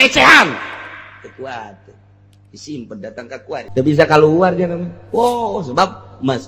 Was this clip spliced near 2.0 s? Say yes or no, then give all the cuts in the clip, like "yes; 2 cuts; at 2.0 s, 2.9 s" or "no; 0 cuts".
no; 1 cut; at 3.7 s